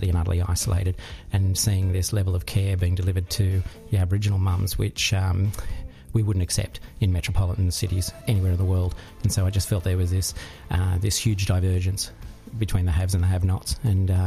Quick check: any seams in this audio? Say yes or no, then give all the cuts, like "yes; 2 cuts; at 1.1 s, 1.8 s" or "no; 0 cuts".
yes; 1 cut; at 8.1 s